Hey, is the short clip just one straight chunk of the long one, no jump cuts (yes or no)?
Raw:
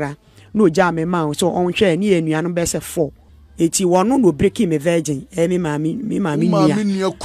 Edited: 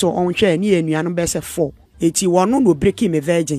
no